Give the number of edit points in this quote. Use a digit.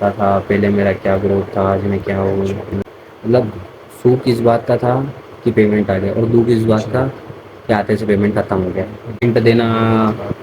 2